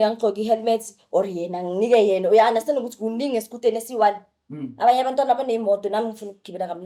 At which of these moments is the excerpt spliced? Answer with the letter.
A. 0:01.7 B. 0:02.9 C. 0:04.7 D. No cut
D